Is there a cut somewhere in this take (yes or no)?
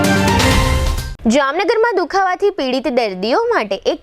no